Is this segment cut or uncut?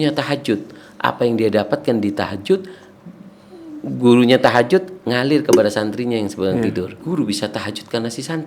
cut